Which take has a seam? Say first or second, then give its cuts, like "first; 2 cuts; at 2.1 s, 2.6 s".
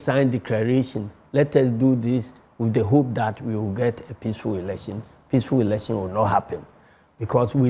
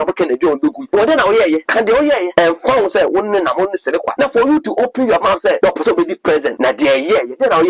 second; 5 cuts; at 0.8 s, 2.0 s, 4.1 s, 5.6 s, 6.5 s